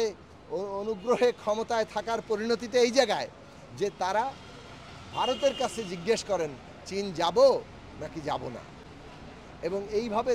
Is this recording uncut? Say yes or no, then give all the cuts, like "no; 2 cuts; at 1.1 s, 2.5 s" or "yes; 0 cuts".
yes; 0 cuts